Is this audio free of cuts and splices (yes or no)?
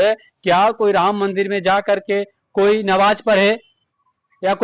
yes